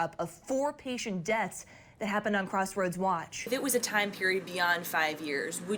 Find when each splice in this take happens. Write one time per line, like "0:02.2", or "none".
0:03.5

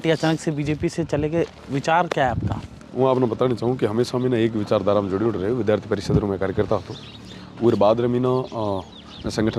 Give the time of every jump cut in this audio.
none

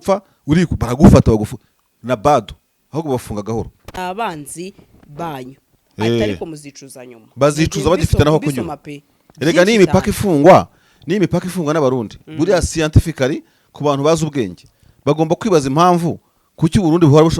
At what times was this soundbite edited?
0:04.0

